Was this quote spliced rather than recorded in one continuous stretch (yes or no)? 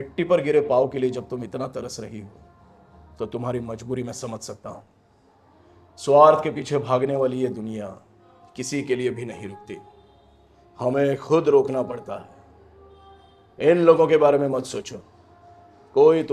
no